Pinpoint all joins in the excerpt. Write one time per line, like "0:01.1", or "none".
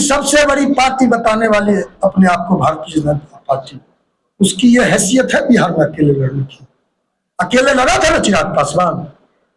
none